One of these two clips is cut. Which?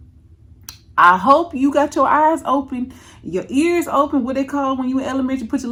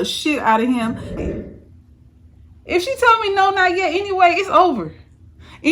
second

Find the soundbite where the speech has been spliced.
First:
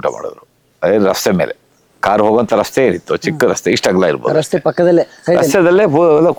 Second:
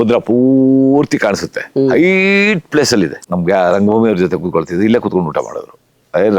second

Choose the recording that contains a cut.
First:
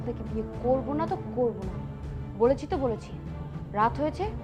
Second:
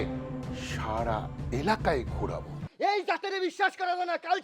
second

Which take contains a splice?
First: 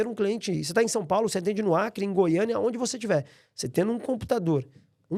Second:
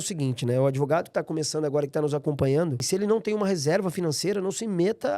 second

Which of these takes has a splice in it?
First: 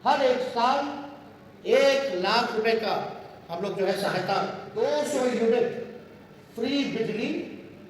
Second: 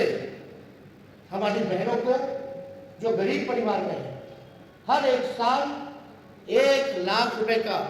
first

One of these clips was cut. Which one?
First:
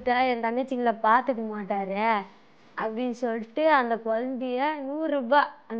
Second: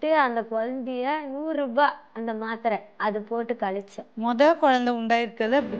second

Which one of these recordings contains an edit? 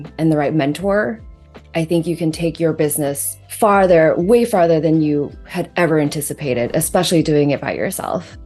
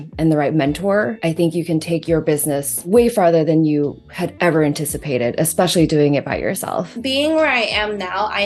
second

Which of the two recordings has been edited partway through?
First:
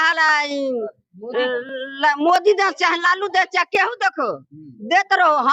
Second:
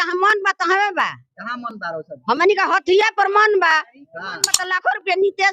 second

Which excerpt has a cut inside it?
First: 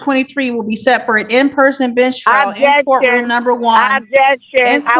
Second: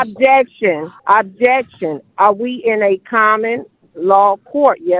second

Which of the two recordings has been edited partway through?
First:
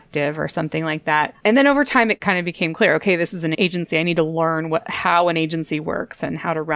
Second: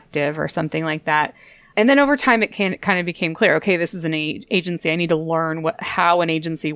first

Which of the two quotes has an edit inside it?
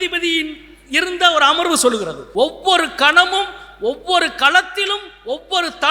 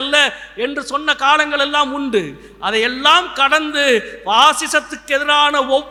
first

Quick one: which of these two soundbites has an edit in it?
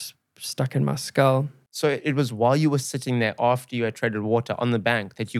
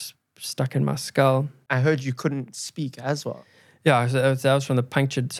first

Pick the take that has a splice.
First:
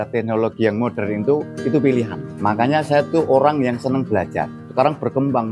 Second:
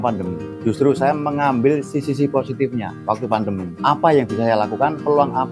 first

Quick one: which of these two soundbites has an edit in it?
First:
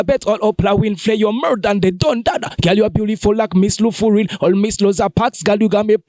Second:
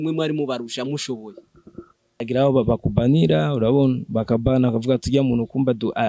second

